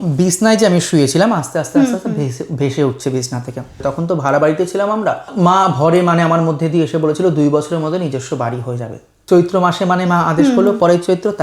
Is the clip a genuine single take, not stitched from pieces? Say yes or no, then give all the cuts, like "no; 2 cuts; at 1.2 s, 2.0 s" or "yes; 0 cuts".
no; 3 cuts; at 3.8 s, 5.3 s, 9.1 s